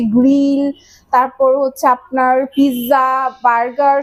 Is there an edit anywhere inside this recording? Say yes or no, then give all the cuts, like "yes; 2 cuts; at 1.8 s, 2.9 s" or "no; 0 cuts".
no; 0 cuts